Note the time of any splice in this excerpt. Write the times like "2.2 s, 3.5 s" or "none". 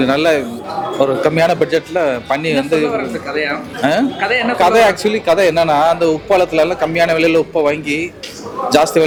none